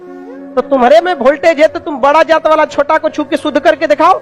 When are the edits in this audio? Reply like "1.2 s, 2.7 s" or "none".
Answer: none